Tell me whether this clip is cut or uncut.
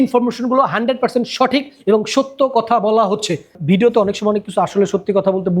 cut